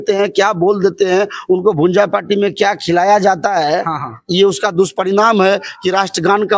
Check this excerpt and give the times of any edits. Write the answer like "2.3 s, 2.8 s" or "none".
none

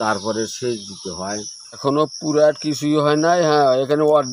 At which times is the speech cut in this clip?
1.8 s

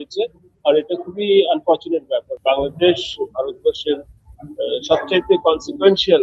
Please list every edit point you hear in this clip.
2.3 s

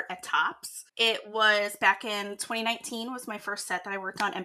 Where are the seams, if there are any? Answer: 1.0 s

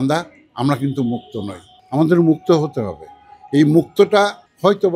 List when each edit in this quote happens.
none

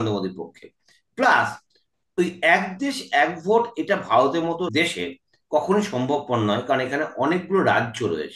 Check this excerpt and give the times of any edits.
none

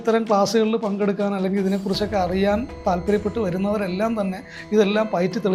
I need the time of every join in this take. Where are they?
none

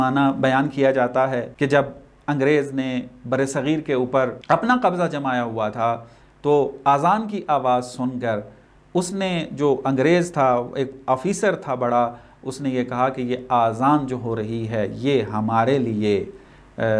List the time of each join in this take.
1.5 s, 4.4 s

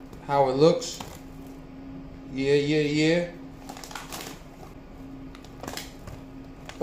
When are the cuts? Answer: 4.8 s

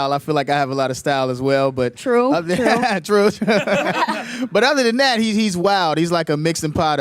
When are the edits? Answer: 1.6 s

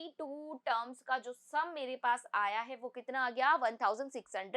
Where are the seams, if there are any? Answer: none

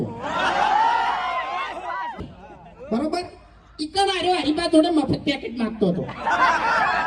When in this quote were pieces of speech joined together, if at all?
2.2 s

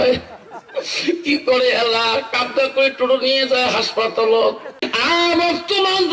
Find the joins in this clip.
4.8 s

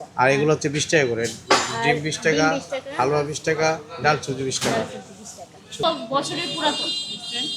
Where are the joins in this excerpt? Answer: 5.8 s

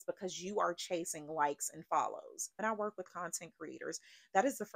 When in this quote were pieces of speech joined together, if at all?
2.6 s

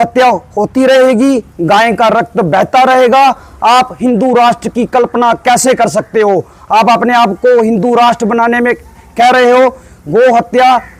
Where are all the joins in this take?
none

